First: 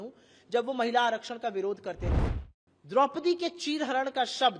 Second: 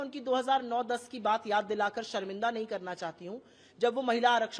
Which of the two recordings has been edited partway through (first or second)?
first